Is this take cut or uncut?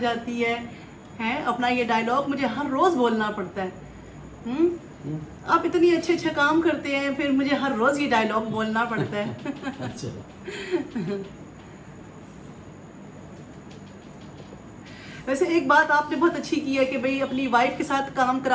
uncut